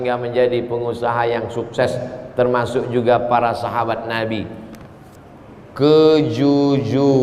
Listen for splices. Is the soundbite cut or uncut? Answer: uncut